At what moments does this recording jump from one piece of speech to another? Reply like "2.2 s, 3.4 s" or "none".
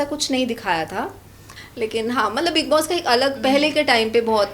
1.5 s